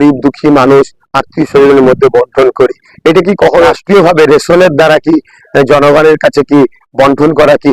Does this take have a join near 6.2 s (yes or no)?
no